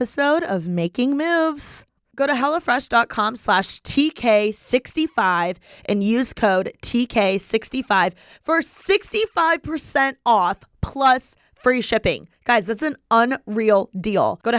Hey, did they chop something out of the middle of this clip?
yes; 1 cut; at 1.9 s

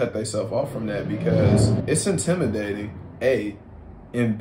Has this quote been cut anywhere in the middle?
yes; 1 cut; at 1.8 s

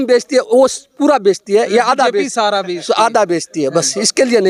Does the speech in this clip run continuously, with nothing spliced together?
yes; 0 cuts

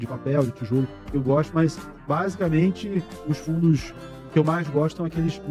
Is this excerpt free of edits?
yes; 0 cuts

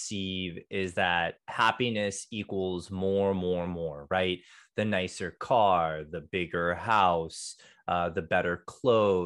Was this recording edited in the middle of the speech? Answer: no; 0 cuts

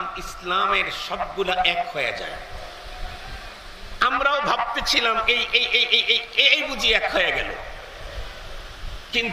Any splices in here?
no; 0 cuts

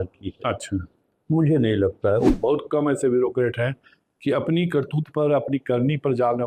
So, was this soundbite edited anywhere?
yes; 1 cut; at 2.3 s

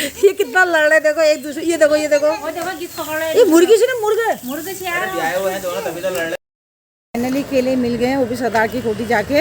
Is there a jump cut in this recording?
yes; 1 cut; at 6.3 s

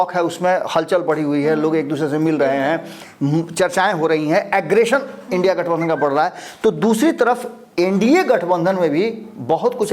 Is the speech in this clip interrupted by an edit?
no; 0 cuts

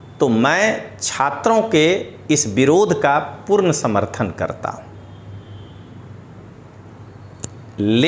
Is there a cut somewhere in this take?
no; 0 cuts

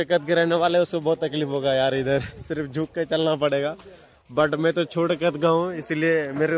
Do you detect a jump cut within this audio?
no; 0 cuts

